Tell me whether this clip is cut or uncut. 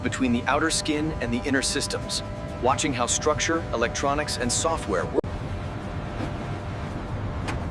cut